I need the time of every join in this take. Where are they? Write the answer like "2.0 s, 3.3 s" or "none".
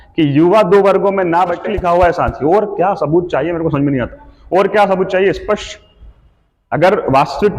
1.7 s